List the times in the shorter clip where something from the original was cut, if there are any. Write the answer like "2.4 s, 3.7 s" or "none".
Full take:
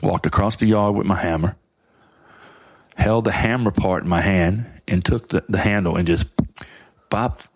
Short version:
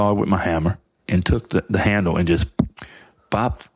0.9 s

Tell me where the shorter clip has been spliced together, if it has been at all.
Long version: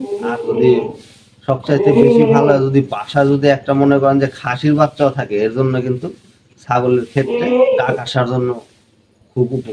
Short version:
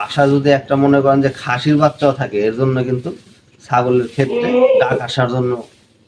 none

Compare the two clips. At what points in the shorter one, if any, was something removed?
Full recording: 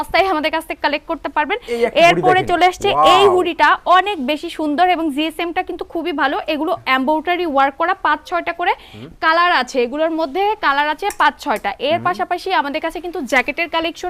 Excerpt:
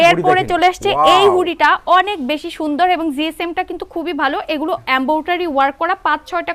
none

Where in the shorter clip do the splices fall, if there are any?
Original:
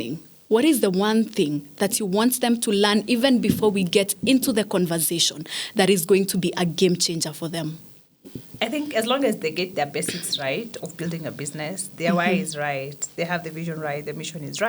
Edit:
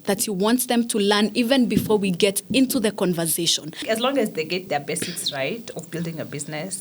3.8 s

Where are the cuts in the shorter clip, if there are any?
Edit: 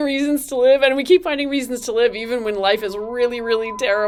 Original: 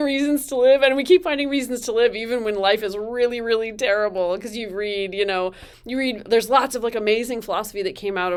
none

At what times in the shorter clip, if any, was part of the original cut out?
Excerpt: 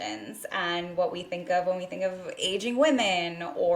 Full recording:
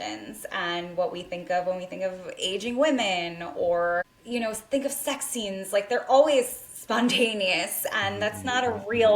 none

